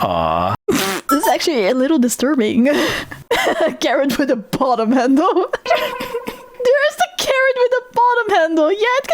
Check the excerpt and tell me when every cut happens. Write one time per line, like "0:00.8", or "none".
0:03.2